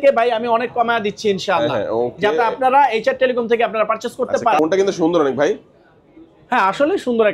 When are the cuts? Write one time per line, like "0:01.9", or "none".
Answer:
0:04.6